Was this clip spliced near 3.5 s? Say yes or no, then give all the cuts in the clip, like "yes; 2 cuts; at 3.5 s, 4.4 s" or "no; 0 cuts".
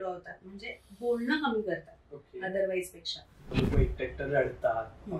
yes; 1 cut; at 3.5 s